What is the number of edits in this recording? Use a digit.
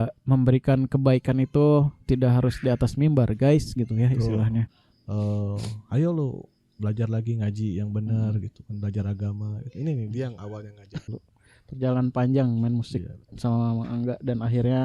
2